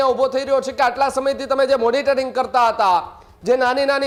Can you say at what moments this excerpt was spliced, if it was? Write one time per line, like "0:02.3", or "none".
none